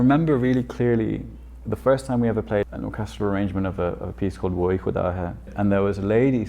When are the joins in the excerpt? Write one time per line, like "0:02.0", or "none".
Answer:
0:02.7
0:05.4